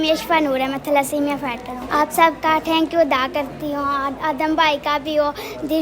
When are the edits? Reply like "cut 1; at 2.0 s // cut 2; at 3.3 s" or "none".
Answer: cut 1; at 1.8 s